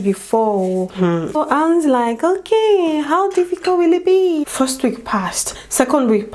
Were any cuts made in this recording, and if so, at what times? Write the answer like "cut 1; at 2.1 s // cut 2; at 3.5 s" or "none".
cut 1; at 1.4 s // cut 2; at 4.5 s